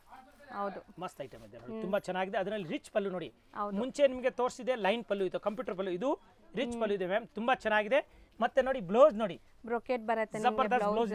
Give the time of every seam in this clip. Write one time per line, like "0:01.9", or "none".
none